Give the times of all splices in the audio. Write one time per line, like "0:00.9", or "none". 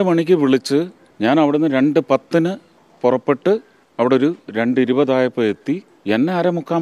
0:01.0
0:03.8
0:05.9